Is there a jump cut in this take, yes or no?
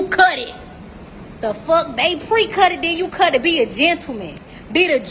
no